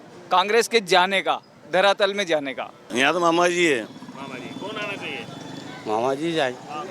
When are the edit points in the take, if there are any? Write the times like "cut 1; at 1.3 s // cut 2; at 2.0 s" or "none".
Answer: cut 1; at 2.8 s